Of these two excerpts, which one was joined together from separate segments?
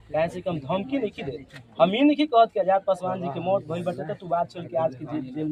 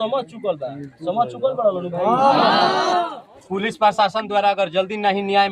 second; 1 cut; at 3.3 s

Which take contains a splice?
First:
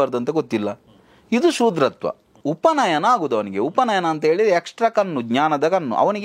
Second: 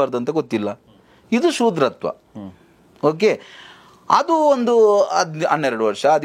first; 1 cut; at 2.3 s

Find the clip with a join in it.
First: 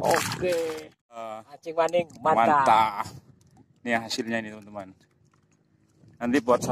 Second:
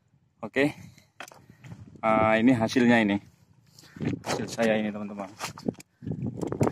first; 1 cut; at 1.3 s

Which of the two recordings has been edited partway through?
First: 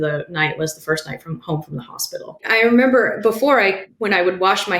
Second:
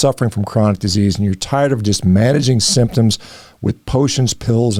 first; 2 cuts; at 2.4 s, 3.9 s

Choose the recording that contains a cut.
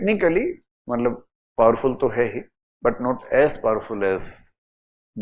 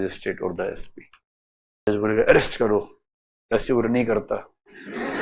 second; 1 cut; at 1.9 s

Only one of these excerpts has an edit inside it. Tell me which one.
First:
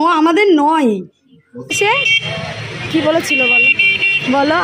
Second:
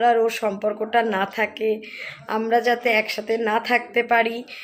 first; 1 cut; at 1.7 s

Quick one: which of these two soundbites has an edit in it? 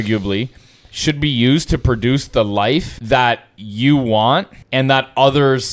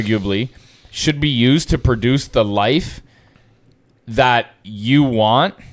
first; 2 cuts; at 2.9 s, 4.6 s

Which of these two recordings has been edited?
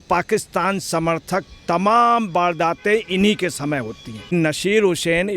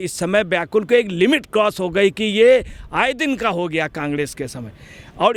first; 1 cut; at 4.3 s

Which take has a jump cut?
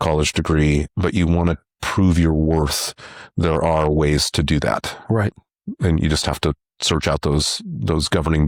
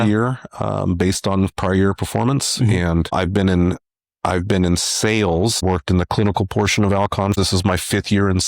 second; 3 cuts; at 3.1 s, 5.6 s, 7.3 s

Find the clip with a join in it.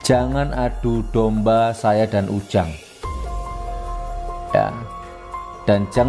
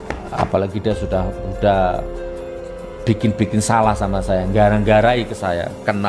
first; 2 cuts; at 2.7 s, 4.2 s

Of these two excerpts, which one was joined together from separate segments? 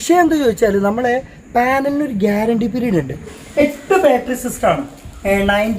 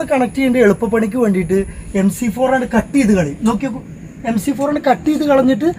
first; 1 cut; at 3.3 s

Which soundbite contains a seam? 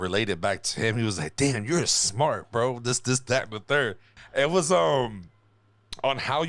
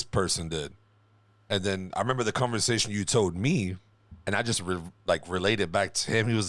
first; 1 cut; at 4.1 s

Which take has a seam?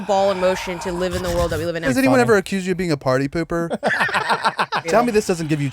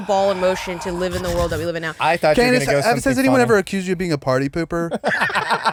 first; 2 cuts; at 1.8 s, 4.8 s

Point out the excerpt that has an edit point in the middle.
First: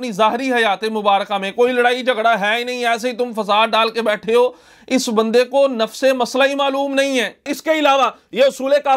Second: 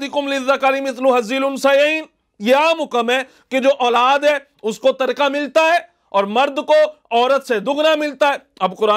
first; 1 cut; at 7.5 s

